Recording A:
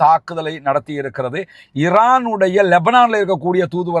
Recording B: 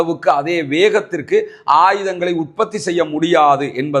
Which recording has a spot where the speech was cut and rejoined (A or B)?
A